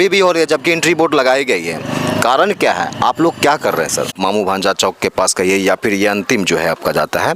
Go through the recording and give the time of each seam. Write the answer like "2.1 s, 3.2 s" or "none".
4.2 s